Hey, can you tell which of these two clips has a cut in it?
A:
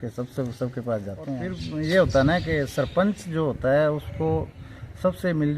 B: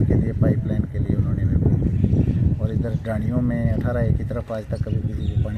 A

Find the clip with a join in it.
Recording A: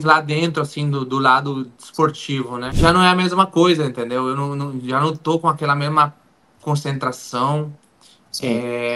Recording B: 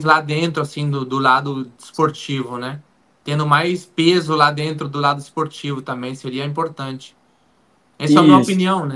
A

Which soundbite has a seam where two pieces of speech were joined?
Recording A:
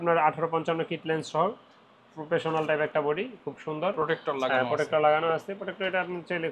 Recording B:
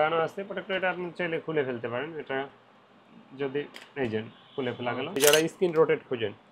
B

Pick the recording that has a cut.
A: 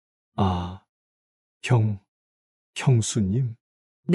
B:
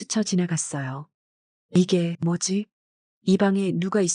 B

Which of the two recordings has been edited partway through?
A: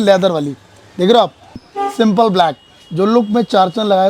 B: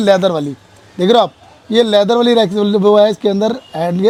A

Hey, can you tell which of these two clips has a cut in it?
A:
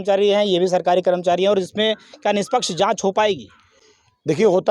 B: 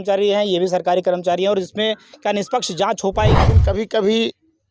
B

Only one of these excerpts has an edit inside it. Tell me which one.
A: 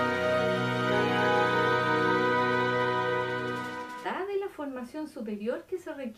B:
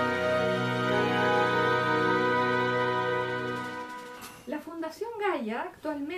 B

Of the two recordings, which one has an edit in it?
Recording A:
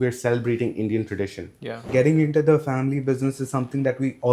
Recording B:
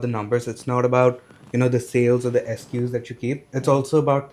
A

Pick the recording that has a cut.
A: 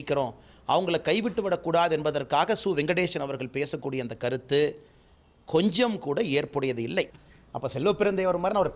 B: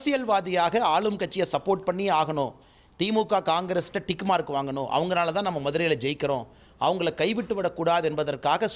A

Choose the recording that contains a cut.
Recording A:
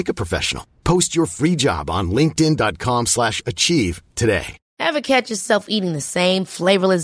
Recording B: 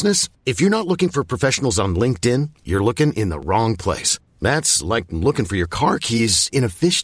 A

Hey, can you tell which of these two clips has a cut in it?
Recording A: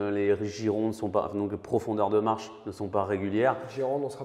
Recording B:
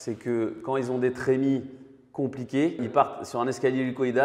B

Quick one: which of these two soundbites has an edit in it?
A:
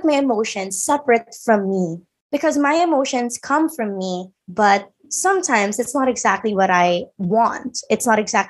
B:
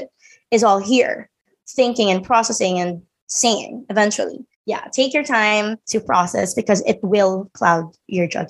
B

